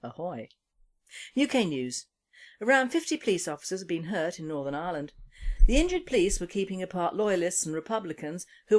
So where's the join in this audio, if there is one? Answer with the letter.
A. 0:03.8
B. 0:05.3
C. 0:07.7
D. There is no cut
A